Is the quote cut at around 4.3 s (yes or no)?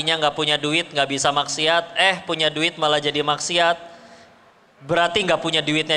no